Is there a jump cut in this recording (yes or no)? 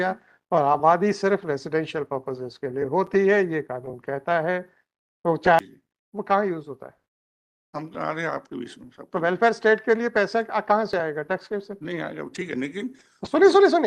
yes